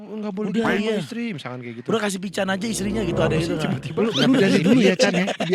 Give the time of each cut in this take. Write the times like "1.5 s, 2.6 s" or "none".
none

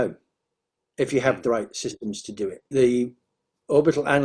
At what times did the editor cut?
2.7 s

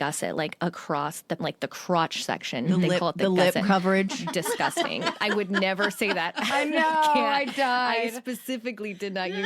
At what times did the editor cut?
1.4 s

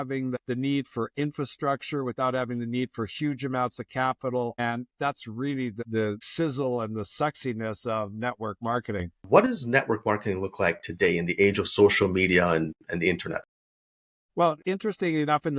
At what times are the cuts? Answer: 9.2 s

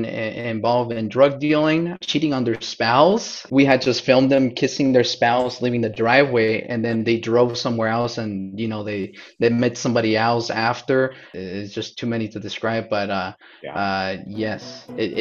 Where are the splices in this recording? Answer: 2.0 s, 3.4 s, 11.3 s

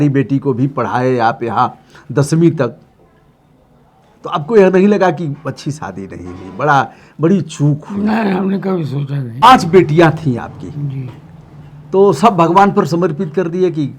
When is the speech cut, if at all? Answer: 9.4 s

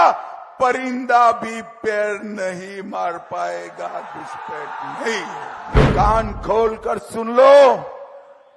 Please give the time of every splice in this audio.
5.8 s

